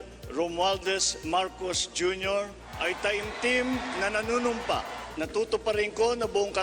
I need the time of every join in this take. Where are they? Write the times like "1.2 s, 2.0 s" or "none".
2.7 s, 5.0 s